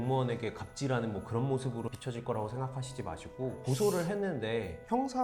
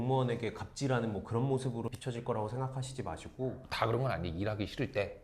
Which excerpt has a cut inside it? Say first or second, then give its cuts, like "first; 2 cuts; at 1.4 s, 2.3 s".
second; 1 cut; at 3.6 s